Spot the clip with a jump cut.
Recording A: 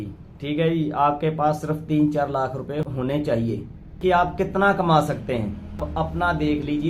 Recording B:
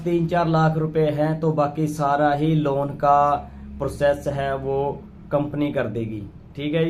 A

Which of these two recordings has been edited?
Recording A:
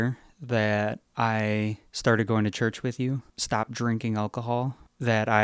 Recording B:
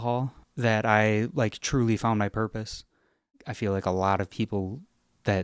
B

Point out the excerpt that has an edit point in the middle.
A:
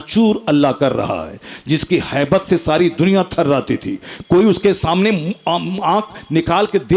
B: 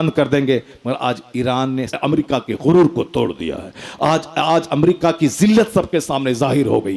B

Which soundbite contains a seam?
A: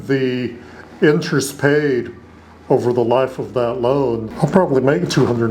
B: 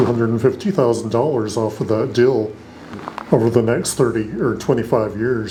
A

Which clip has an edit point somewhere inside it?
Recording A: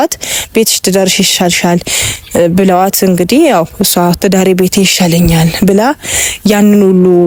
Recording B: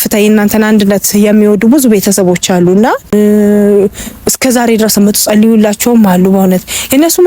B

